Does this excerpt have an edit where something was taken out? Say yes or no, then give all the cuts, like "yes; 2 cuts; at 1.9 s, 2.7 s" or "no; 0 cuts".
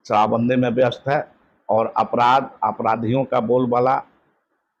no; 0 cuts